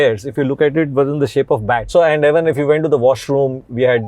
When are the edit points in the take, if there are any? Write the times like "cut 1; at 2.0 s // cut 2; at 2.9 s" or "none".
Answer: cut 1; at 1.9 s